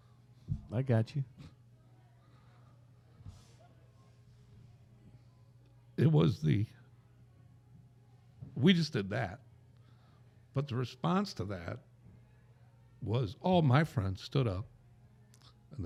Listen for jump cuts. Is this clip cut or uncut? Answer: uncut